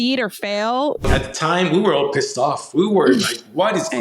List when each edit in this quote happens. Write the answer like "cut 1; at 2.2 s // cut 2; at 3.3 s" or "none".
cut 1; at 1.1 s